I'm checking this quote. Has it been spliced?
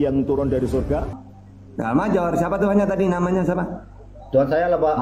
yes; 1 cut; at 1.1 s

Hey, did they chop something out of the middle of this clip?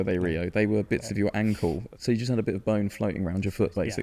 yes; 1 cut; at 1.9 s

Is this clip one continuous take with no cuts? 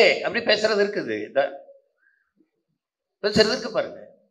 yes; 0 cuts

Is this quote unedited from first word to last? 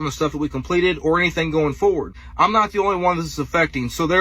no; 1 cut; at 2.2 s

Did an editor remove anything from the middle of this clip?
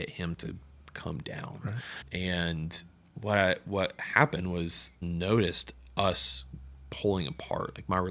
yes; 1 cut; at 4.9 s

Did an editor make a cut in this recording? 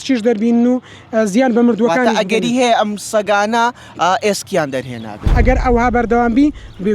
yes; 1 cut; at 5.3 s

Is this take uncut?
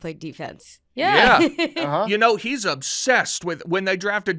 no; 1 cut; at 2.0 s

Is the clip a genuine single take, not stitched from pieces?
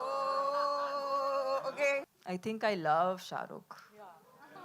no; 1 cut; at 2.2 s

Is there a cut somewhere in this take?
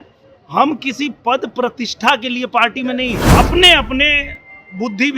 yes; 1 cut; at 3.2 s

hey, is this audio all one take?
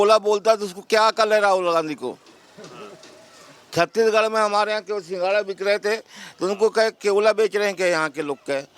yes; 0 cuts

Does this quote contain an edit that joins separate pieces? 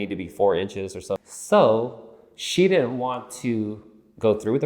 yes; 1 cut; at 1.2 s

